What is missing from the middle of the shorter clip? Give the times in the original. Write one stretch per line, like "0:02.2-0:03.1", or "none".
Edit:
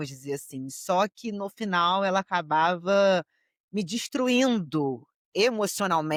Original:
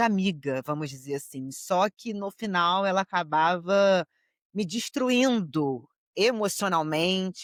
none